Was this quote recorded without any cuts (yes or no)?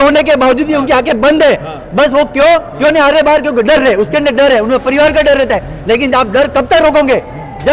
yes